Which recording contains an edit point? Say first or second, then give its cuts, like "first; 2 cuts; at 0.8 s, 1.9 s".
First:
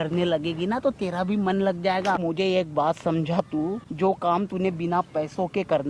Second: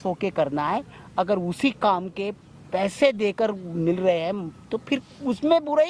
first; 2 cuts; at 2.2 s, 3.8 s